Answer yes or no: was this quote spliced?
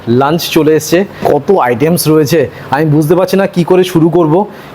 yes